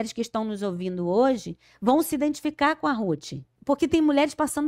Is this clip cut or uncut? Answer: cut